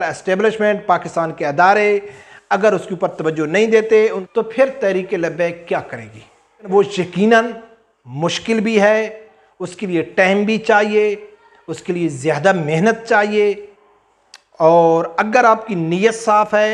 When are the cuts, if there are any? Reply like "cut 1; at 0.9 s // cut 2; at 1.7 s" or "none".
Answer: cut 1; at 4.2 s // cut 2; at 6.7 s